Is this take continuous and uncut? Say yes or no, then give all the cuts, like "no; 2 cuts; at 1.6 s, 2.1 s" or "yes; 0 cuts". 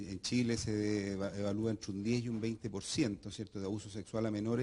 yes; 0 cuts